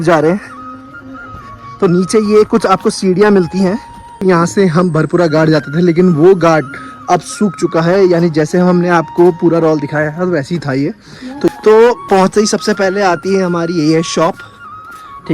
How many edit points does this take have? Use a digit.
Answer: 2